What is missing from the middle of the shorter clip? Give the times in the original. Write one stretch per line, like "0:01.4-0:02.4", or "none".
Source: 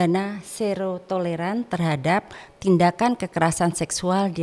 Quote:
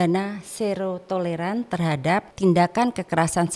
0:02.3-0:02.5